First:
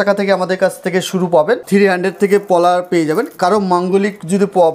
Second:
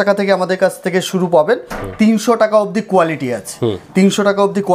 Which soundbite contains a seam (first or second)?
first